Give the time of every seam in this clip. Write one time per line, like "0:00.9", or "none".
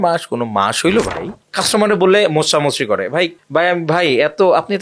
0:01.4